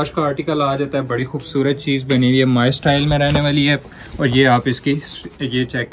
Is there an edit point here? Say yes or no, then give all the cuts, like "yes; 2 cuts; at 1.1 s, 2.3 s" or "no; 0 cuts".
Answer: no; 0 cuts